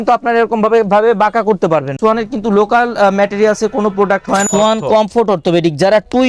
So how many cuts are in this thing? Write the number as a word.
two